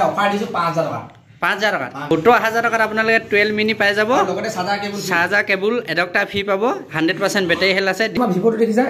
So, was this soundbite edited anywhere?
yes; 2 cuts; at 2.0 s, 8.1 s

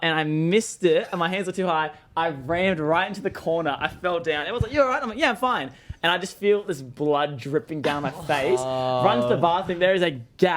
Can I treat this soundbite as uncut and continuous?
yes; 0 cuts

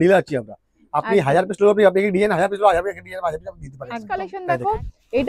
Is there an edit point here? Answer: yes; 1 cut; at 4.2 s

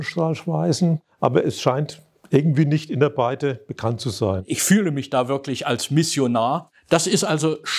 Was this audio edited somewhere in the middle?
yes; 3 cuts; at 1.1 s, 4.4 s, 6.7 s

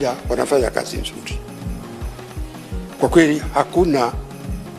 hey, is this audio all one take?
no; 2 cuts; at 1.2 s, 2.5 s

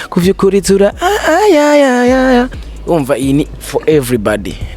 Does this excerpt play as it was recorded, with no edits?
no; 1 cut; at 2.7 s

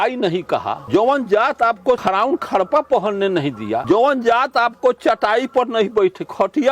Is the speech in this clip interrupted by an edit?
yes; 3 cuts; at 0.8 s, 2.0 s, 3.8 s

